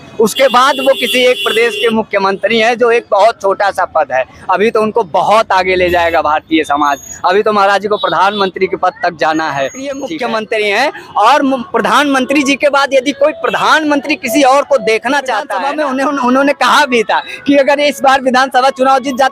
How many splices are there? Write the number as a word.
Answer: two